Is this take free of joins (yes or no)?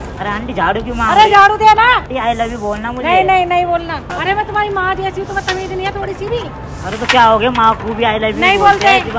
no